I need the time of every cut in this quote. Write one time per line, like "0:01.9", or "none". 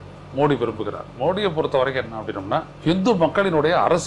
0:02.7